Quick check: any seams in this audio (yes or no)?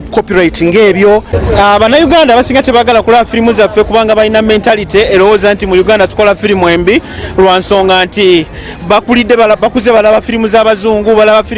yes